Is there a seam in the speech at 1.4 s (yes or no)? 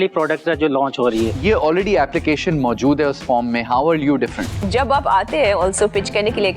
yes